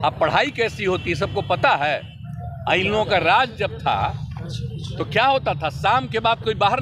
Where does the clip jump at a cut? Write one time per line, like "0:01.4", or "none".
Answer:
none